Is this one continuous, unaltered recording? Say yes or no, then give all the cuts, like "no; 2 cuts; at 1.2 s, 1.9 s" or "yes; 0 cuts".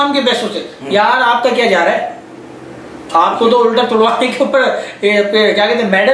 yes; 0 cuts